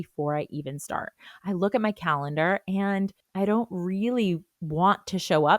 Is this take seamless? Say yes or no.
no